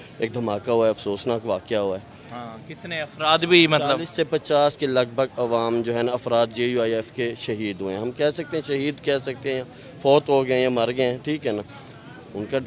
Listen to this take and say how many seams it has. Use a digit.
0